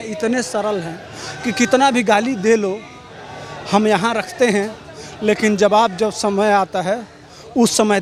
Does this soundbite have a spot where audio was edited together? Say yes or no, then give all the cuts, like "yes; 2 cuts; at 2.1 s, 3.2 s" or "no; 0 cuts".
no; 0 cuts